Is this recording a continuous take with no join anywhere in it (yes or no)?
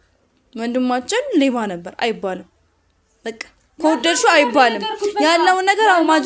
yes